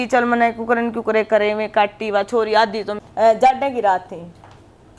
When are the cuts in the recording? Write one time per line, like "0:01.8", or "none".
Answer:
0:02.9